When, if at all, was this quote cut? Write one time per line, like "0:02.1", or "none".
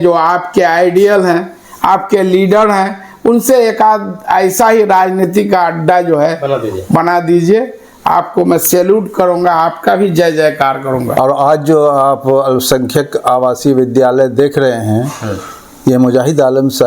0:11.1